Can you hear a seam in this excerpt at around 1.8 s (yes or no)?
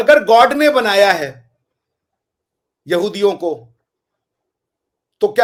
no